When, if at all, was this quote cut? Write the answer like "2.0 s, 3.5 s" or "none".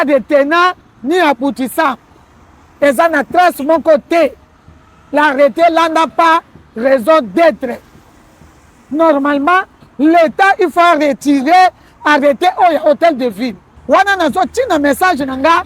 13.7 s